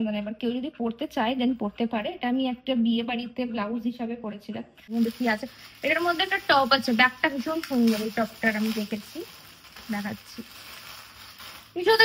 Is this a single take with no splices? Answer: no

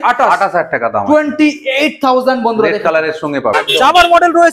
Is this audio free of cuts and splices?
no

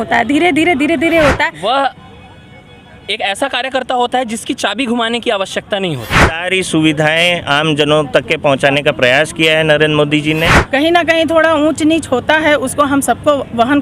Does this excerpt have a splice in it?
yes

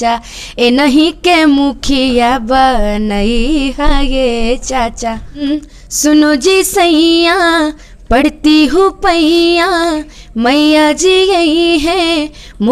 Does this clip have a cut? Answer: yes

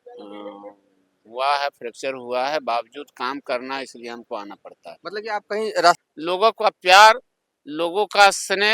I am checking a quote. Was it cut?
yes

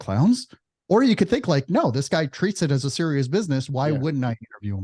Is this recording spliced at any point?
no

